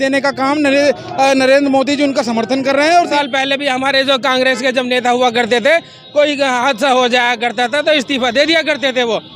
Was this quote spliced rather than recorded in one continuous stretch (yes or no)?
yes